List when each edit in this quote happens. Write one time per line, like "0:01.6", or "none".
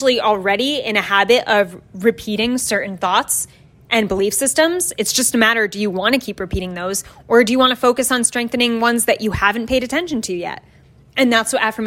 none